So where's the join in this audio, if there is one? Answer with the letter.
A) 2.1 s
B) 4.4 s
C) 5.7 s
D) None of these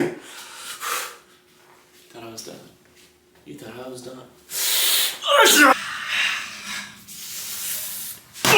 C